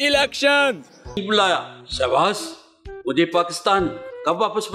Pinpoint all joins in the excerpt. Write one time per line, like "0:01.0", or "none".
0:01.2